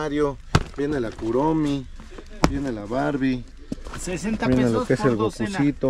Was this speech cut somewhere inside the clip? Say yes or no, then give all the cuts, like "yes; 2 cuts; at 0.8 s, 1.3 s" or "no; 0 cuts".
no; 0 cuts